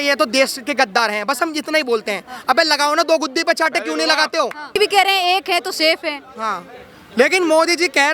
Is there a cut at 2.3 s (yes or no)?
no